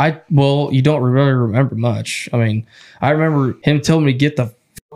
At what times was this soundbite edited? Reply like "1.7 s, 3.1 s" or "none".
3.6 s